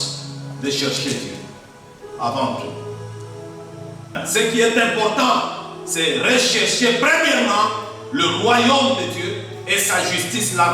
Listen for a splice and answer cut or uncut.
cut